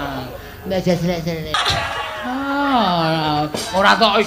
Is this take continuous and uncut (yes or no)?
no